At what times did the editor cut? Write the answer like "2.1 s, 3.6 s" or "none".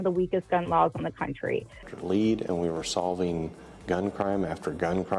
1.8 s